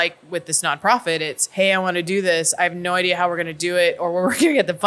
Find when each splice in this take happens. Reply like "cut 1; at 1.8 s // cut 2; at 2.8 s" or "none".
cut 1; at 1.4 s